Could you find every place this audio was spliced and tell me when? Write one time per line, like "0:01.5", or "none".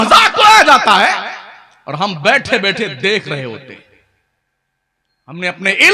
none